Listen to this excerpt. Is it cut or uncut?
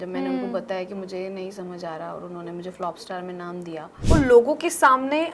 cut